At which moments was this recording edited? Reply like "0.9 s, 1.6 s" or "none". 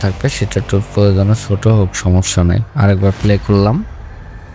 2.7 s